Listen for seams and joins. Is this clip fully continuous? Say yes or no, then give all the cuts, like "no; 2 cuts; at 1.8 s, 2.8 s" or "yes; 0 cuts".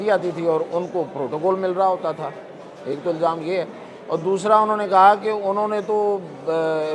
yes; 0 cuts